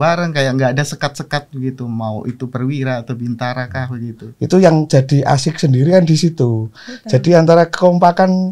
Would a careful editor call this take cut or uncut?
cut